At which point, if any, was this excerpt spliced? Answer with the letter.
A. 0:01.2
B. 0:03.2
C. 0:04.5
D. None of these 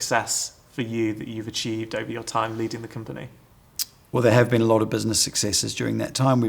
D